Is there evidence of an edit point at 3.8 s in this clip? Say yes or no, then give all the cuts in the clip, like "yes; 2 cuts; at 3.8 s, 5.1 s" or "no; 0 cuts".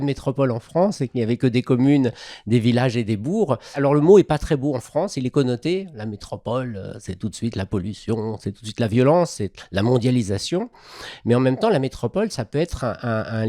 yes; 1 cut; at 3.8 s